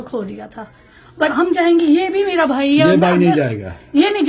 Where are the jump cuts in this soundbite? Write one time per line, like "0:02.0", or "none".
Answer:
0:01.3